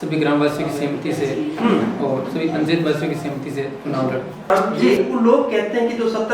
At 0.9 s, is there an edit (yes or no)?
no